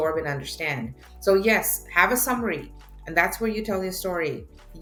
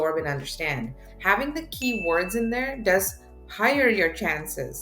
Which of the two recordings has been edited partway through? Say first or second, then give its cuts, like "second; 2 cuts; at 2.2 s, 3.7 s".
second; 1 cut; at 1.1 s